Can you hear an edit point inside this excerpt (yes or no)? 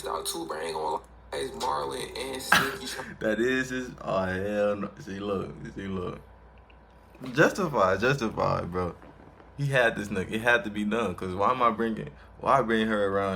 yes